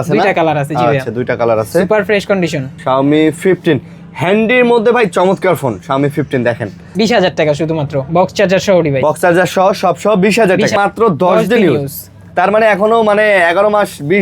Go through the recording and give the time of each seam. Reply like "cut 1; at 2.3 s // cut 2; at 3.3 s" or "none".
cut 1; at 2.7 s // cut 2; at 6.8 s // cut 3; at 10.8 s